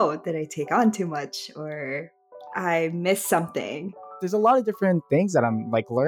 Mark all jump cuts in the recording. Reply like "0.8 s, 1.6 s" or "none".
4.2 s